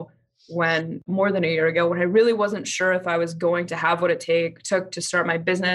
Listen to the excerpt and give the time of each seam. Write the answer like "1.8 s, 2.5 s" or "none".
1.0 s